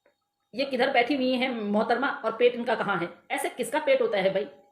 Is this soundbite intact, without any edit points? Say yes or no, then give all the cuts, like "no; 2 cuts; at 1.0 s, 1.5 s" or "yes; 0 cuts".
no; 1 cut; at 3.2 s